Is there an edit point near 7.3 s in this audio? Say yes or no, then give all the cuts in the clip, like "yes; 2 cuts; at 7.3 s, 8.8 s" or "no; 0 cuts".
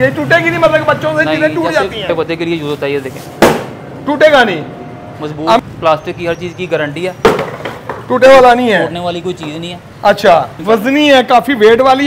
no; 3 cuts; at 2.1 s, 5.6 s, 10.5 s